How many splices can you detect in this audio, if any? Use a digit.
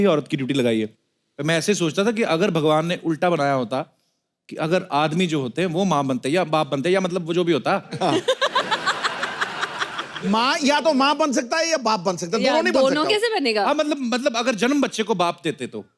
0